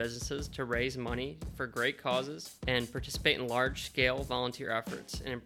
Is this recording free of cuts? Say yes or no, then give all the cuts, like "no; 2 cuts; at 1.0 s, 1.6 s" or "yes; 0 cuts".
no; 1 cut; at 2.5 s